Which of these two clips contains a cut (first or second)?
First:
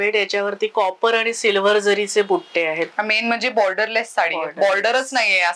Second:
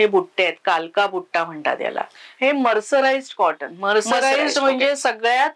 second